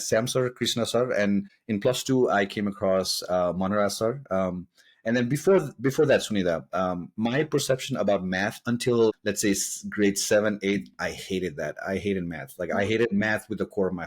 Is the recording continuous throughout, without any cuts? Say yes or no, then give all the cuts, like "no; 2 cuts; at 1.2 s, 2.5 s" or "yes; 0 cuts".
no; 2 cuts; at 1.6 s, 9.2 s